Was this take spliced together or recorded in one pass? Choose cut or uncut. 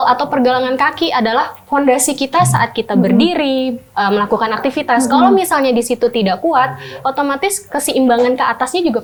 uncut